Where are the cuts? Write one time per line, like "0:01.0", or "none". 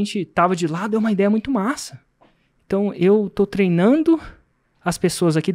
none